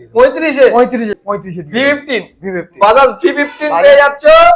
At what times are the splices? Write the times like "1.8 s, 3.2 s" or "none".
1.2 s